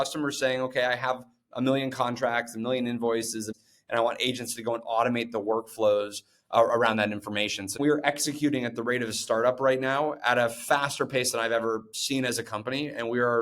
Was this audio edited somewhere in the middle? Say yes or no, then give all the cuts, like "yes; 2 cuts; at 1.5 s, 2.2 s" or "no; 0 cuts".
yes; 2 cuts; at 3.5 s, 7.8 s